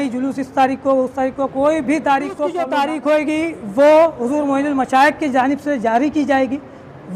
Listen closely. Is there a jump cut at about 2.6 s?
yes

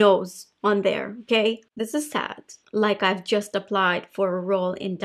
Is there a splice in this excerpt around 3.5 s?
no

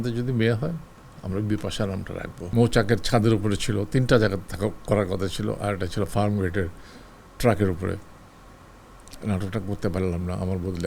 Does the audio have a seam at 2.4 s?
yes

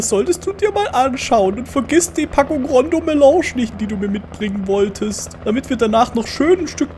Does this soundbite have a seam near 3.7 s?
yes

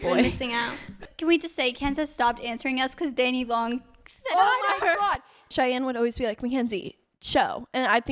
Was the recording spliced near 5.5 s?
yes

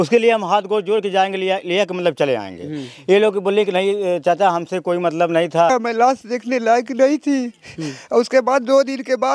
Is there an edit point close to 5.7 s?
yes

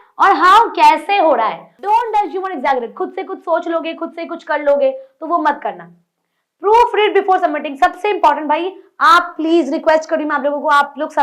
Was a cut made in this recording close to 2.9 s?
no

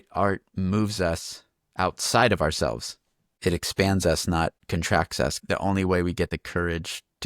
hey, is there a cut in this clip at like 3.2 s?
no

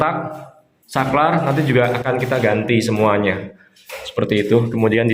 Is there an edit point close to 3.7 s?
no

